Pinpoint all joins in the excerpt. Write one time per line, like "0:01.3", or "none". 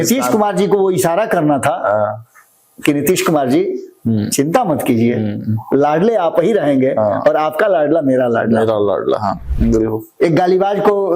0:09.5